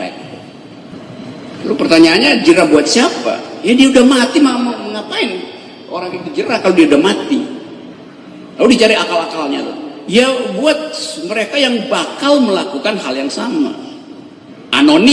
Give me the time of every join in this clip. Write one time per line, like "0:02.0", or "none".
0:00.9